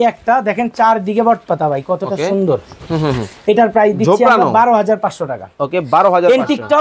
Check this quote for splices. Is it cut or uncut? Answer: uncut